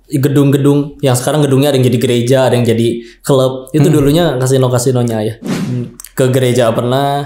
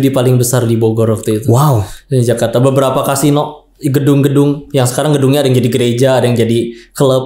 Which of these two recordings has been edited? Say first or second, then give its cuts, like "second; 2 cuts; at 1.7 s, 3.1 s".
first; 1 cut; at 5.4 s